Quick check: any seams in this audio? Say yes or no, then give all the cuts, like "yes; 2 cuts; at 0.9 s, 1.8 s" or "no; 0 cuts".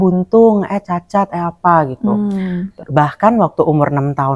no; 0 cuts